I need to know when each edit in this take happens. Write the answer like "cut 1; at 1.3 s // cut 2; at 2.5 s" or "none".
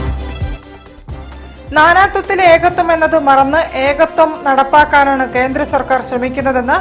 cut 1; at 1.1 s